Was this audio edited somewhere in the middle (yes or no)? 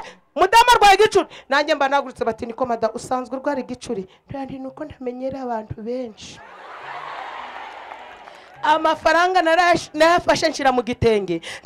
no